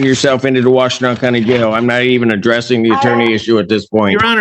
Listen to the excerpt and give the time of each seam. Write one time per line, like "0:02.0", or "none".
none